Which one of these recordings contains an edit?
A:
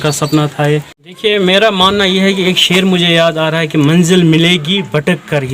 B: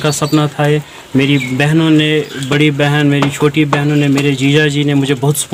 A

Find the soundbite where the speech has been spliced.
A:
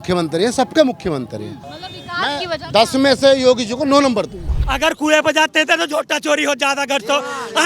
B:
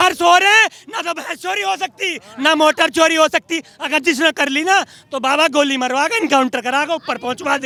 A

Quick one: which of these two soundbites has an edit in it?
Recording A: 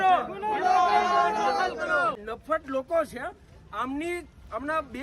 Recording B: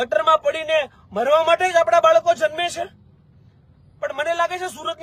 A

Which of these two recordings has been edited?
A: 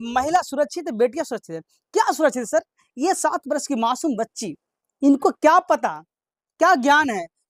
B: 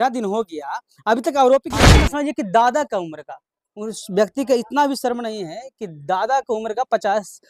B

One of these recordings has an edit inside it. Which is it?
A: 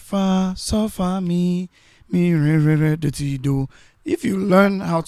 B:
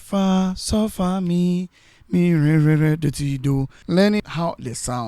B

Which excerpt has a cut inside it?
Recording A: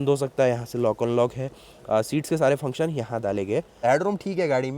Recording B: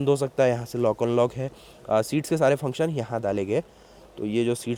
A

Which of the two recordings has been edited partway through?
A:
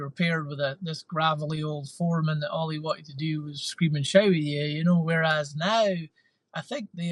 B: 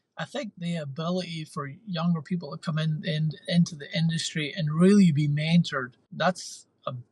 B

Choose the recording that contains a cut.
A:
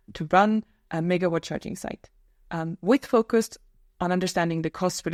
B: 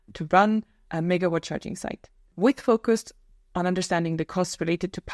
B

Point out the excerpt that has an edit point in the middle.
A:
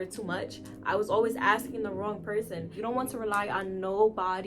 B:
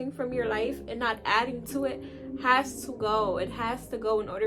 A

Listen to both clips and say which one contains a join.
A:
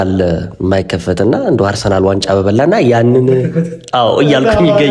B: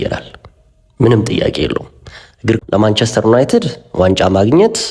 B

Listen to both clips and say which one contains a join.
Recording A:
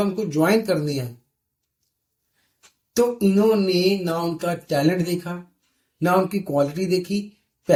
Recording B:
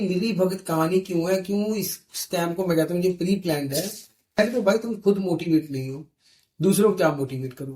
B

